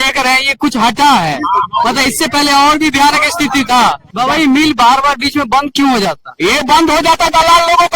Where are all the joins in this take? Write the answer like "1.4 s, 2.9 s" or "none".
4.0 s